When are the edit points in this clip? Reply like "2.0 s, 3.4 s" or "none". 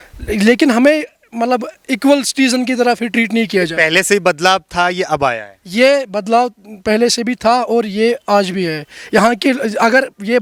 none